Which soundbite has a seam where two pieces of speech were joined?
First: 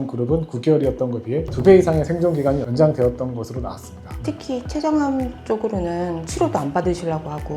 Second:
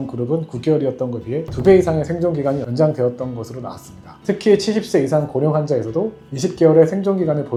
first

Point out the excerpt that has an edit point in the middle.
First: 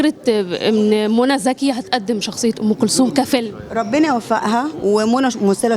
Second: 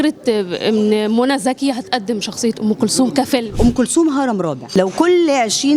second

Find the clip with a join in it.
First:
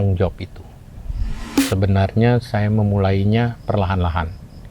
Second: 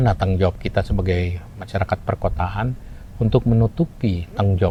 first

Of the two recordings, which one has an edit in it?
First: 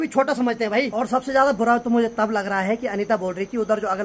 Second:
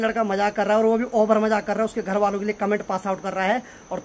first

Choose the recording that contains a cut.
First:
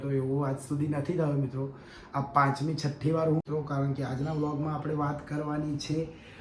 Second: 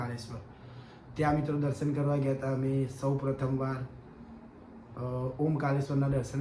first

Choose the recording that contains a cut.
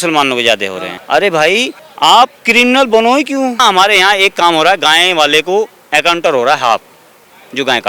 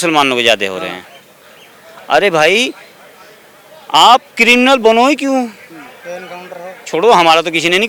first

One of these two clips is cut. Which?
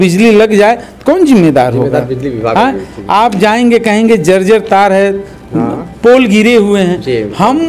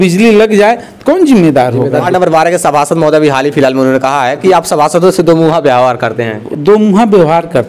second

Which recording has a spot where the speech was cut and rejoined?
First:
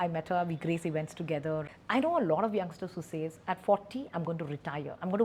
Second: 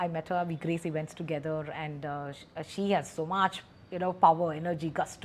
first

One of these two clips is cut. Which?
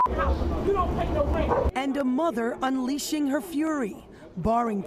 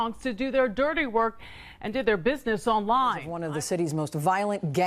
second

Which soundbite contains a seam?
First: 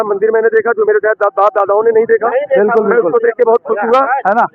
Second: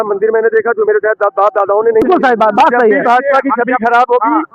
second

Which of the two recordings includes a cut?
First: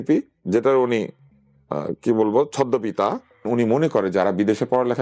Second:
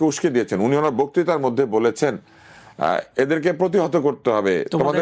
first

